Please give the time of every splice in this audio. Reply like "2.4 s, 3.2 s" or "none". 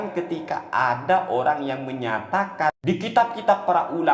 2.7 s

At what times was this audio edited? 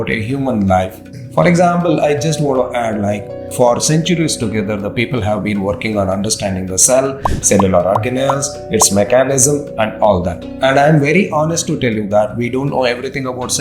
1.1 s, 3.5 s, 10.4 s

